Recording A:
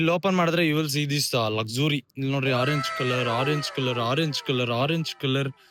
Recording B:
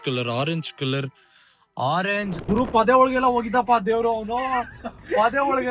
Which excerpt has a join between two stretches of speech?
B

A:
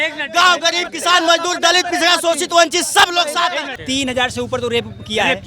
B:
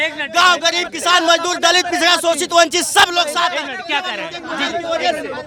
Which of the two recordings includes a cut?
A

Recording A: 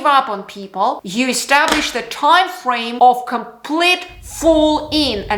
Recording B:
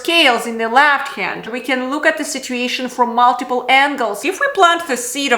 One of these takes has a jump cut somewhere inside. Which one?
B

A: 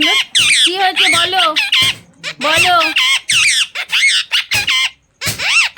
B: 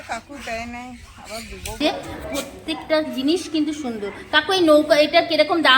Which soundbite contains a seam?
B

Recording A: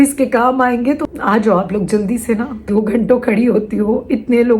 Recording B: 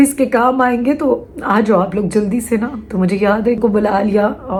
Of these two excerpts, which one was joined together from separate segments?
A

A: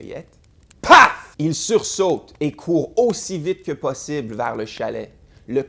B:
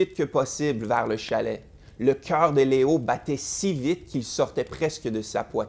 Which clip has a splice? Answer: A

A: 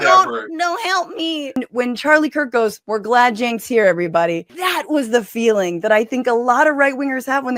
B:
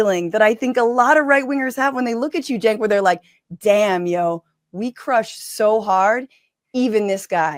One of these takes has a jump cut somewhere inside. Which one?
A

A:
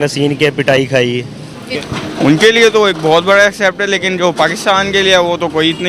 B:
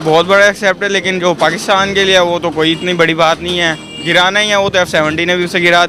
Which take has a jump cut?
A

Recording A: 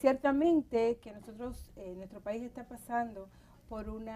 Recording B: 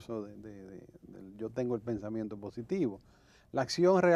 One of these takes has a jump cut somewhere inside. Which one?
A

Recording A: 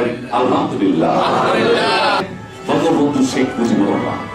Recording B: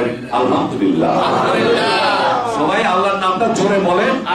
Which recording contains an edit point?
A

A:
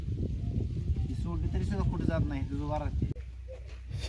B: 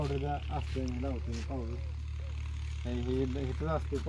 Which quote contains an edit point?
A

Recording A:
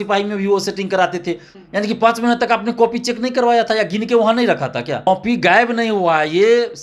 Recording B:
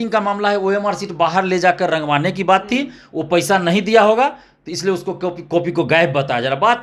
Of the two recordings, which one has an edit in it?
A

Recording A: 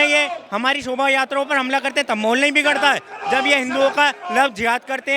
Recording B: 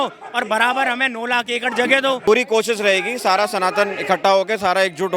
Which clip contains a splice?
B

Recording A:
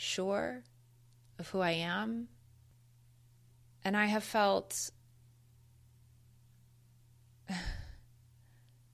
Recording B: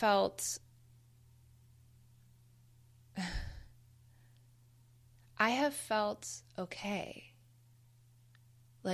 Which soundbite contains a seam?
A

